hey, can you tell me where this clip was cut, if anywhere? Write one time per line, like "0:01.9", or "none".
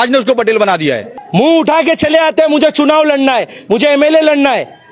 0:01.1